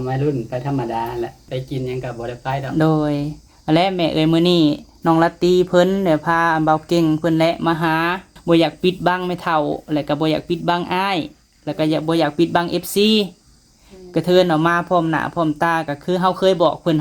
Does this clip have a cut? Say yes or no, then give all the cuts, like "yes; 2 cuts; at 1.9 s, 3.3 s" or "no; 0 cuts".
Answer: yes; 2 cuts; at 1.4 s, 8.3 s